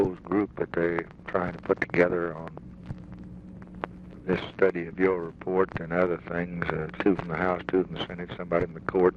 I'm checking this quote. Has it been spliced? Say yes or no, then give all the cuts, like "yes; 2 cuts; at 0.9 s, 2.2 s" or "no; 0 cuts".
yes; 1 cut; at 6.6 s